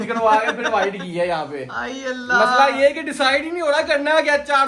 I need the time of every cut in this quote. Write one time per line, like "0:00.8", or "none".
none